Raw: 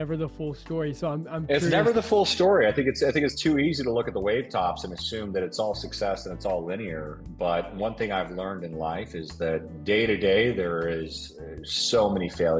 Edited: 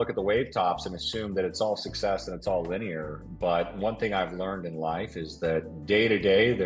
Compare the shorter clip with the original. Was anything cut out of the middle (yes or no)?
no